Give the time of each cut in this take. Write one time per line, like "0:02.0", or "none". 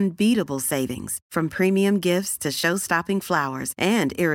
none

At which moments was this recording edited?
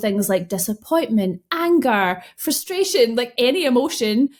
none

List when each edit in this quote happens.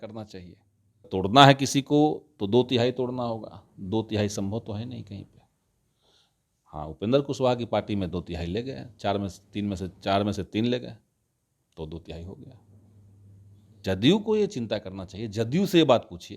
0:01.1
0:13.8

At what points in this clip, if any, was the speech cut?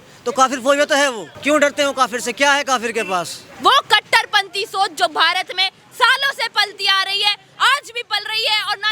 0:01.3
0:03.4

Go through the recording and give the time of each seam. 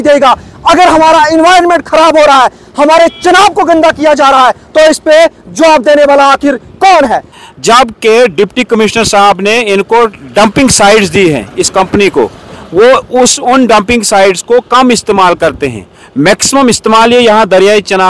0:07.3

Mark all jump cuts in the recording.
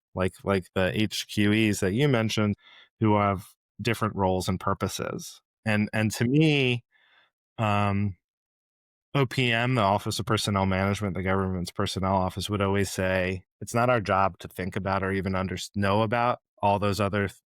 0:02.6

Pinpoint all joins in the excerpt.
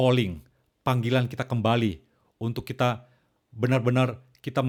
none

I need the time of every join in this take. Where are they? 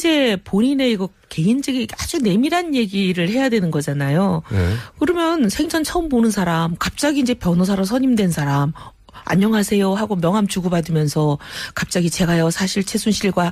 0:05.5

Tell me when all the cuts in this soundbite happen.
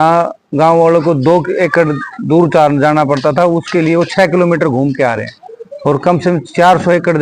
none

